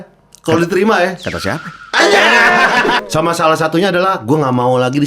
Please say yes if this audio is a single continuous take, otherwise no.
no